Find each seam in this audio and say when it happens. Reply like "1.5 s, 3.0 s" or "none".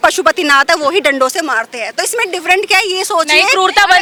none